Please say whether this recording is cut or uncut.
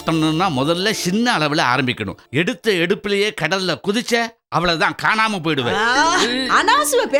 uncut